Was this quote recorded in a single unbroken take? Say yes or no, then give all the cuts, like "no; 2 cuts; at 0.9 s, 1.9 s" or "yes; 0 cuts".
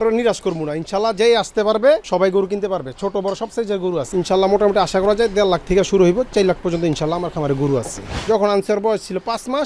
no; 3 cuts; at 2.0 s, 4.1 s, 8.1 s